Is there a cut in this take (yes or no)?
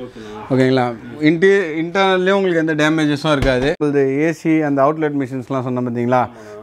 yes